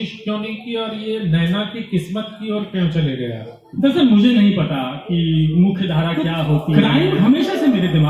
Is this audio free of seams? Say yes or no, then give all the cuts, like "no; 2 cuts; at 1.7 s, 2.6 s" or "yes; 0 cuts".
no; 1 cut; at 6.7 s